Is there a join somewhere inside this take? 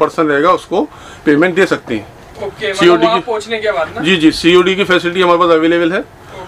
no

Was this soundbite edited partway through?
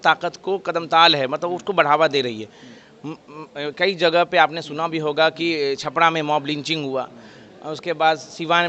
no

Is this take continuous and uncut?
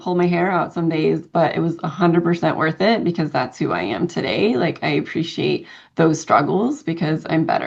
yes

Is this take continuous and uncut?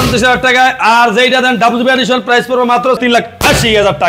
no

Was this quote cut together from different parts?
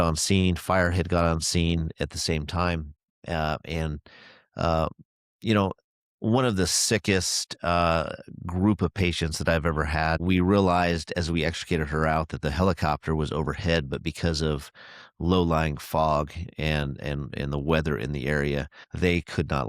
yes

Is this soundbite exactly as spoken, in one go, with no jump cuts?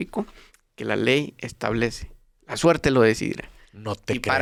yes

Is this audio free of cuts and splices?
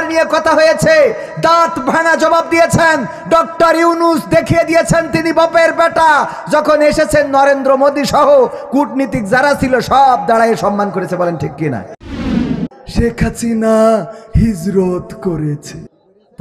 no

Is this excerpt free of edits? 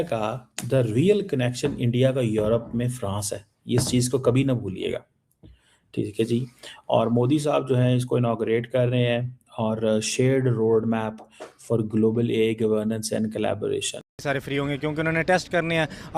no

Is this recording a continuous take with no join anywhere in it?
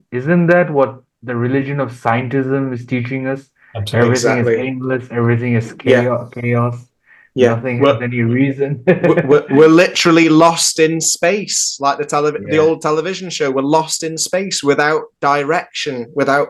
yes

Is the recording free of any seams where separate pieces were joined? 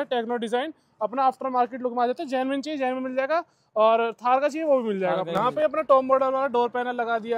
no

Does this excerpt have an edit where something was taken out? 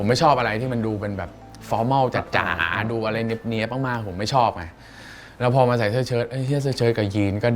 no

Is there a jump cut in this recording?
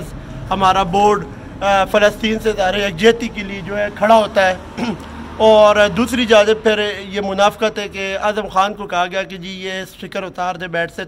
no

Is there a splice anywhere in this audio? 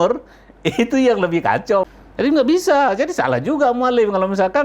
yes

